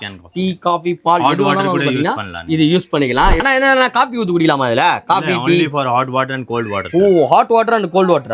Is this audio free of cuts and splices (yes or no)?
no